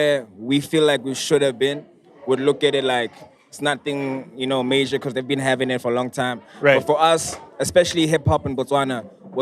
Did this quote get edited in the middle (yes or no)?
no